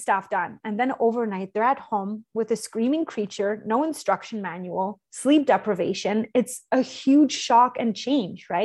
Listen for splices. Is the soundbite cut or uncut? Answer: uncut